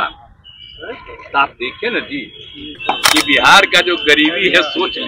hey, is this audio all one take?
no; 1 cut; at 2.8 s

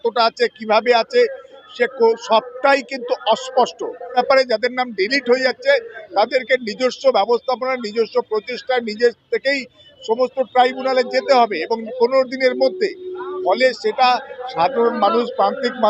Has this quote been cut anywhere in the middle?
yes; 1 cut; at 4.2 s

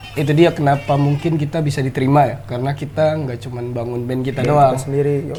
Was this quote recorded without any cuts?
yes; 0 cuts

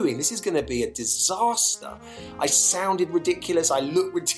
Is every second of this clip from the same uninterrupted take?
yes; 0 cuts

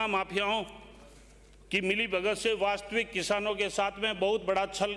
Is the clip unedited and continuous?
yes; 0 cuts

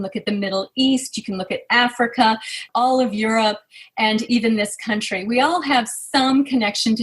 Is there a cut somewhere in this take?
yes; 1 cut; at 2.6 s

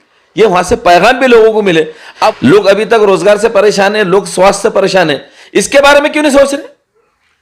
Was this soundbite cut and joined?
yes; 1 cut; at 2.2 s

